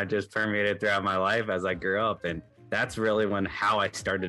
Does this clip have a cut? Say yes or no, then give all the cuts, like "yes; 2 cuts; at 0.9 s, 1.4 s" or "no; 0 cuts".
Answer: no; 0 cuts